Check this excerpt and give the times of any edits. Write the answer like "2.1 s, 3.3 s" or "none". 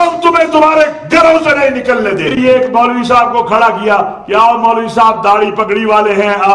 2.4 s